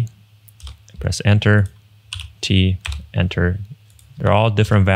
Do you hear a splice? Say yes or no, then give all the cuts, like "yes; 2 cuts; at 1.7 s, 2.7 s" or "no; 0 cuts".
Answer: no; 0 cuts